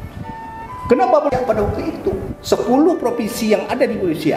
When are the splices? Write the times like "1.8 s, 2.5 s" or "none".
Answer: 1.3 s